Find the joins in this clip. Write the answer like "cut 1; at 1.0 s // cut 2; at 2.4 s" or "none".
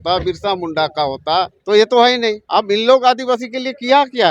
cut 1; at 1.6 s // cut 2; at 2.4 s